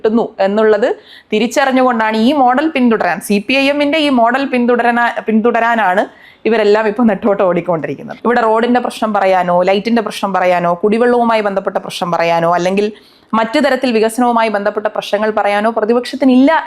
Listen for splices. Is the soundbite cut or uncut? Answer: cut